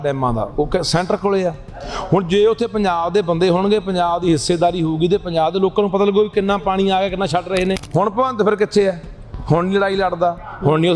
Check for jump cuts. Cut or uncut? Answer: cut